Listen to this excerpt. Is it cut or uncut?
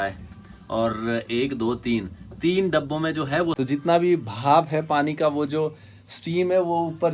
cut